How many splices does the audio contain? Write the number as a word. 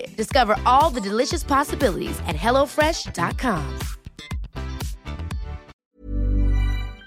one